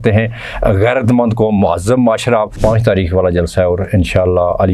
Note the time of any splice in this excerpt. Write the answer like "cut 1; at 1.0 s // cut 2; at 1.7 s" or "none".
cut 1; at 2.5 s